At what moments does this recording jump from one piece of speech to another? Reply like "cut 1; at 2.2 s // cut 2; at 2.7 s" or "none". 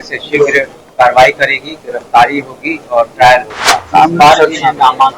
cut 1; at 3.8 s